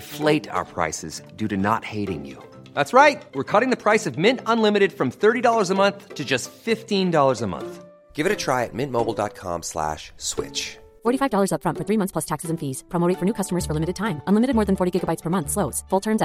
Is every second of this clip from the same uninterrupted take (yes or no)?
yes